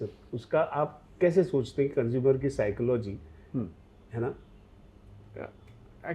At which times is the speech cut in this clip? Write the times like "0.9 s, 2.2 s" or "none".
none